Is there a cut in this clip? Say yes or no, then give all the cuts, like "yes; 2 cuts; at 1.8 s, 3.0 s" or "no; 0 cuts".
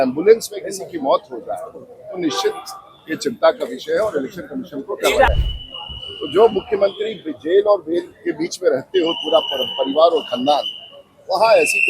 yes; 1 cut; at 5.3 s